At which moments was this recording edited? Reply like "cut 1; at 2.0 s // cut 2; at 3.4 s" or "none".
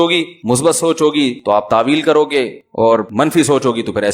cut 1; at 1.4 s // cut 2; at 2.9 s